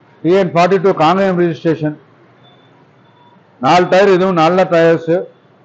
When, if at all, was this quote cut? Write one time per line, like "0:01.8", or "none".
none